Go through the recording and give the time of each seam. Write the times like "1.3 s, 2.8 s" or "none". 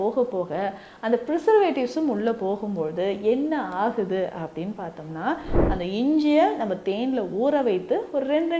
5.6 s

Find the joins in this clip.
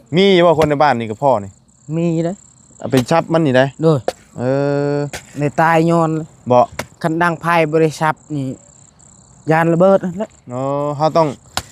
none

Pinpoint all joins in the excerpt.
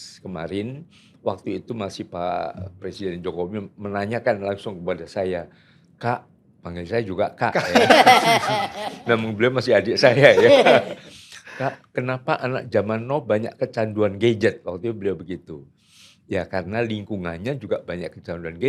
none

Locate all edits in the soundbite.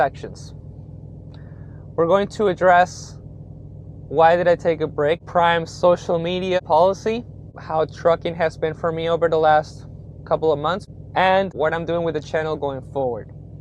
5.2 s, 6.6 s, 7.5 s, 10.8 s, 11.5 s

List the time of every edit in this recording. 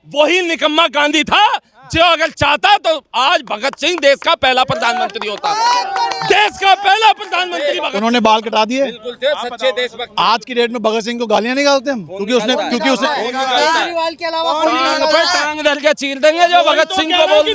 7.8 s

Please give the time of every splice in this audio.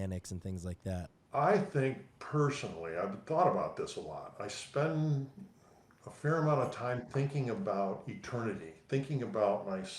1.2 s

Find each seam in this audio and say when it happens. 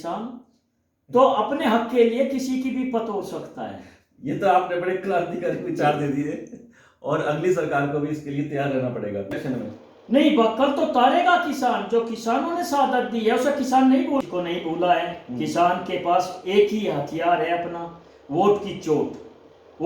9.4 s, 14.2 s

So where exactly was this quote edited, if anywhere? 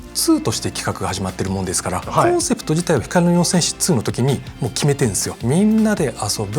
2.1 s, 5.3 s

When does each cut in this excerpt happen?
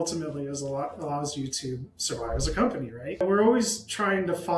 3.2 s

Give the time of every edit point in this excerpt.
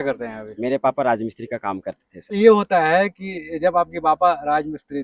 2.4 s

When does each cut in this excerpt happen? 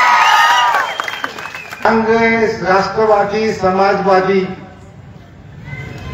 1.8 s

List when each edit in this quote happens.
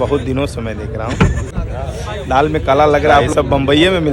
1.6 s, 3.3 s

